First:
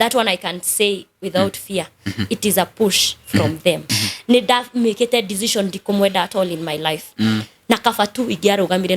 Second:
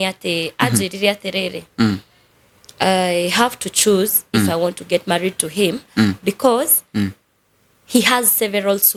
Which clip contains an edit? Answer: first; 1 cut; at 4.0 s

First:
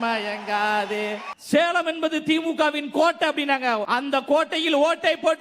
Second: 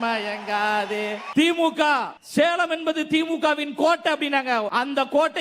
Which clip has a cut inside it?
first; 1 cut; at 1.2 s

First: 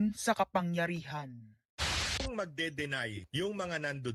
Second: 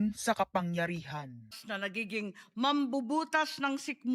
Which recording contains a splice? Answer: second; 1 cut; at 1.6 s

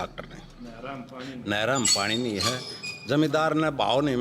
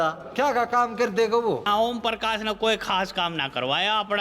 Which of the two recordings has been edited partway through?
second; 1 cut; at 1.7 s

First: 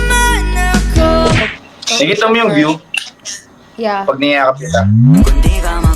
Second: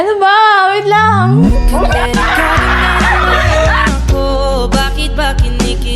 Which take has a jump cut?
first; 1 cut; at 1.4 s

